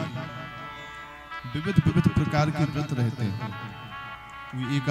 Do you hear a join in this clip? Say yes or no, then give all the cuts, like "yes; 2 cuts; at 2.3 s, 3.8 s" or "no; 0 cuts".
no; 0 cuts